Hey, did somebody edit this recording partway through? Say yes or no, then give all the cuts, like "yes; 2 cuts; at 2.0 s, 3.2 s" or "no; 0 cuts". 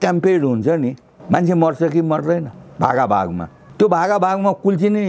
yes; 3 cuts; at 1.1 s, 2.6 s, 3.6 s